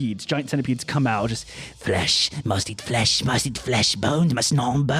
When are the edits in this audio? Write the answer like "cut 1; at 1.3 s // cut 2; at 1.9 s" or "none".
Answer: none